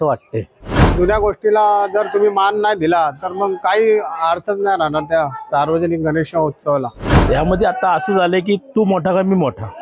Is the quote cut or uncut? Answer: cut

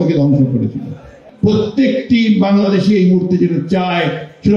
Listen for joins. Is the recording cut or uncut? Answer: cut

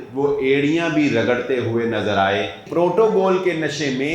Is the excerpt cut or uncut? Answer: cut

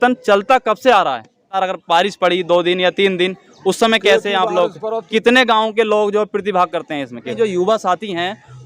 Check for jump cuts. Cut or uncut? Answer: cut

